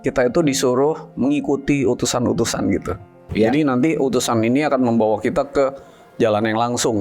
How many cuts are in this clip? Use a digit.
1